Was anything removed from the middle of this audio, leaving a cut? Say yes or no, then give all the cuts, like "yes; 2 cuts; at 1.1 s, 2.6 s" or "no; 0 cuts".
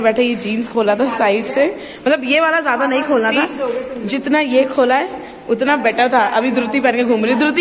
no; 0 cuts